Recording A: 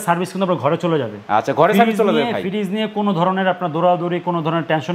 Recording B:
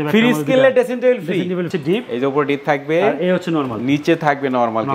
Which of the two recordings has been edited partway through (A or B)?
B